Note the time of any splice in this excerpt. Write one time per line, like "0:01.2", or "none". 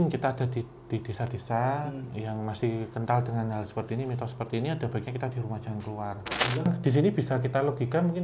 0:06.7

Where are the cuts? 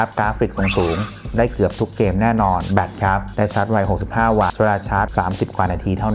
0:03.3

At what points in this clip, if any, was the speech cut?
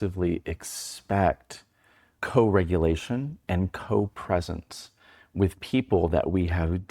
0:02.1

